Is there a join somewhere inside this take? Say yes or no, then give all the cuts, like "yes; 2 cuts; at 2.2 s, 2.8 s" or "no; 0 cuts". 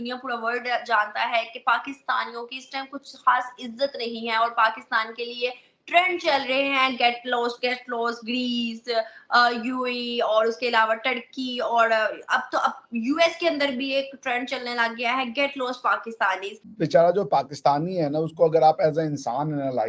yes; 1 cut; at 16.6 s